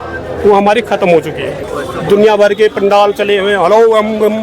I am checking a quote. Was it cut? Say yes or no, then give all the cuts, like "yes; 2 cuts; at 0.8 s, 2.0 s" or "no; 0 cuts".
yes; 1 cut; at 1.6 s